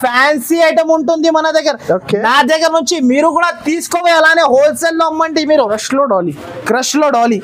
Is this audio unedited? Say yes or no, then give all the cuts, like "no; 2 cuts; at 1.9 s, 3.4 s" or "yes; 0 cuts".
no; 1 cut; at 5.7 s